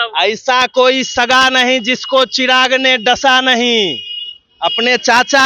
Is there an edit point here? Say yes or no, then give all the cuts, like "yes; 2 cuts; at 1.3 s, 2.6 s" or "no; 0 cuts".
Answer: no; 0 cuts